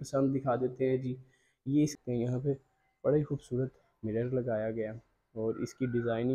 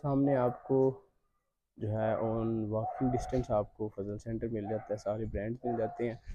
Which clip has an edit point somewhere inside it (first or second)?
first